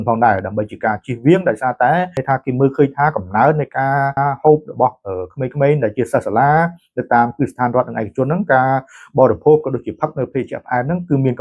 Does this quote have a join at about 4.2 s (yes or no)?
yes